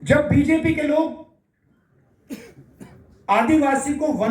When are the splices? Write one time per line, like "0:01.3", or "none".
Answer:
none